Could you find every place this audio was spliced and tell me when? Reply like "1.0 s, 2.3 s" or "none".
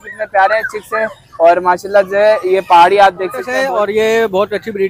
3.5 s